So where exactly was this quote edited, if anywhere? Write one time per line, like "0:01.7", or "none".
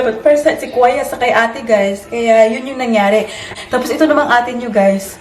0:03.5